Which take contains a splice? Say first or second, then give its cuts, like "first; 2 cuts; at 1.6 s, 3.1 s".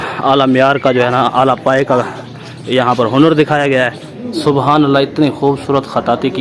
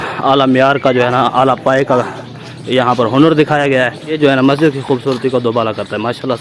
first; 1 cut; at 4.1 s